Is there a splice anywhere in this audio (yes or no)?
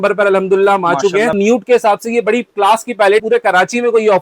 yes